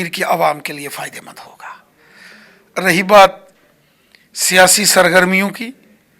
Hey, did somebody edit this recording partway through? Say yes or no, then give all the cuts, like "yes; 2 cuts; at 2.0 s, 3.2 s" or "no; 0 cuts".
no; 0 cuts